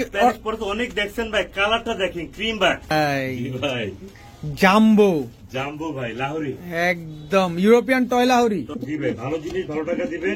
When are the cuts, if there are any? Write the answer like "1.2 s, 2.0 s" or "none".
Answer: 2.9 s, 8.8 s